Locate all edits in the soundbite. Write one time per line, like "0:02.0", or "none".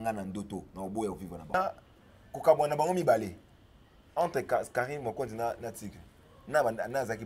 0:01.5